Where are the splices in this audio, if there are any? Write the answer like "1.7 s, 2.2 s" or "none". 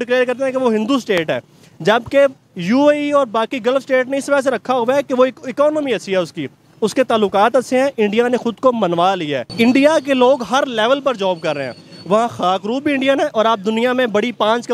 9.4 s